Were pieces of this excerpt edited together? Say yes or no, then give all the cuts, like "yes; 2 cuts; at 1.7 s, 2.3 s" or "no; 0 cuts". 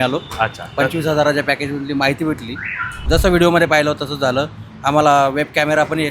yes; 1 cut; at 3.1 s